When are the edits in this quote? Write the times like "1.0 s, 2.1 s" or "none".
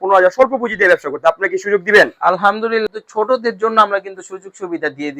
2.8 s